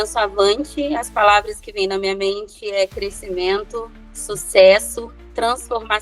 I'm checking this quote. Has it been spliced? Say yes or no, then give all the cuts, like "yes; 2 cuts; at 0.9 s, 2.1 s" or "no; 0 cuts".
no; 0 cuts